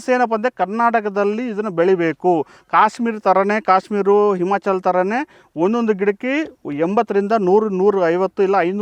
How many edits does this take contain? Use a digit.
0